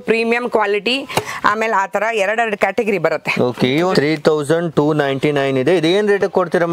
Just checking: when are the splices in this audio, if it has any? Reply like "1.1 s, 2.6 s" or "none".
3.9 s